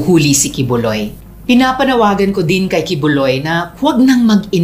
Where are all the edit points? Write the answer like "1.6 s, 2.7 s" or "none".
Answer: 1.2 s